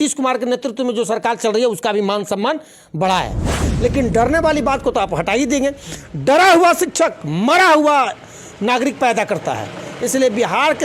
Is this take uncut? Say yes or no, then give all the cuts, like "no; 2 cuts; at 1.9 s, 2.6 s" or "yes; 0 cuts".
no; 1 cut; at 3.6 s